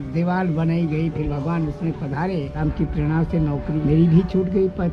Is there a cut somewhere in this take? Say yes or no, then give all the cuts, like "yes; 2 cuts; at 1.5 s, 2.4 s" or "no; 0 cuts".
yes; 2 cuts; at 2.6 s, 3.8 s